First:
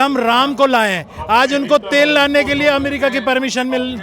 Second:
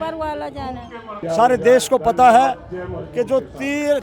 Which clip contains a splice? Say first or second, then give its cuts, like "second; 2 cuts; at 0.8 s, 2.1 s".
second; 1 cut; at 1.2 s